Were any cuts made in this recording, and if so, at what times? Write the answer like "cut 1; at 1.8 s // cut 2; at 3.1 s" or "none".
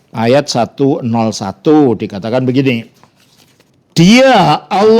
none